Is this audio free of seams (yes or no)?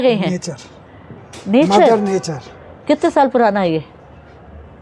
yes